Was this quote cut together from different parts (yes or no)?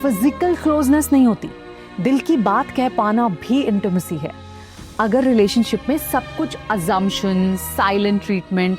no